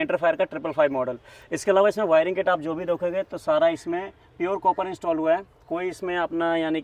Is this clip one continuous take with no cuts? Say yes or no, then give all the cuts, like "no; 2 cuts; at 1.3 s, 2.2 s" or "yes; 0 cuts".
yes; 0 cuts